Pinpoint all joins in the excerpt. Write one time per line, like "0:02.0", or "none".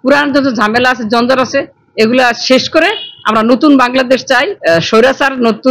0:04.5